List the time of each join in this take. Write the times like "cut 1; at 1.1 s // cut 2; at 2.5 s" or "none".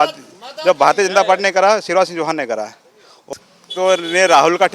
cut 1; at 3.2 s